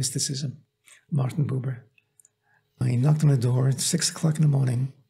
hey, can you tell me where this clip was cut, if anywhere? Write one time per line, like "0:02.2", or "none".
0:02.8

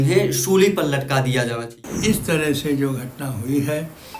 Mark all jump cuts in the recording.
0:01.9

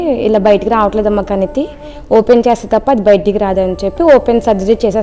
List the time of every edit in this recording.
none

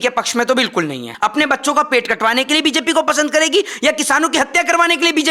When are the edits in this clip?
0:01.1

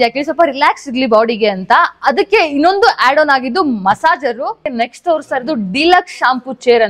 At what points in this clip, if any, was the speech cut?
0:04.7

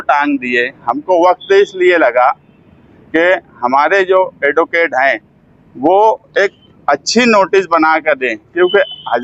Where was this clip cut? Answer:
none

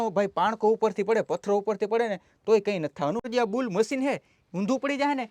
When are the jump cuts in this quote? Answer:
0:03.3

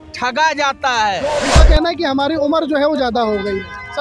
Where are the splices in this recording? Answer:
0:01.4

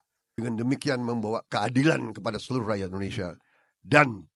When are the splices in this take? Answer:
none

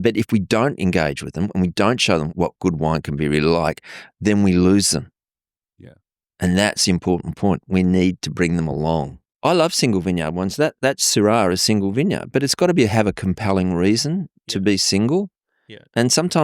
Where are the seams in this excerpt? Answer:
0:09.3

